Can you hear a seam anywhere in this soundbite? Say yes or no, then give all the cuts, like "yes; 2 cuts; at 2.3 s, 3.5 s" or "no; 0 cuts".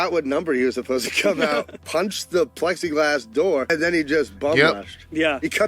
yes; 1 cut; at 3.7 s